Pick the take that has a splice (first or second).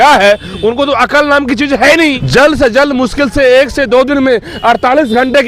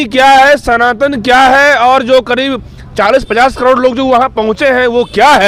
first